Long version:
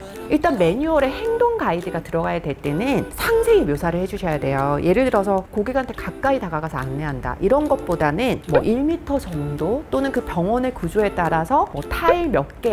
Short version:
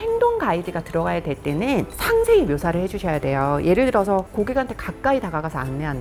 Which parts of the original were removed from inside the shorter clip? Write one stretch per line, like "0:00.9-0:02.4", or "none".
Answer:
none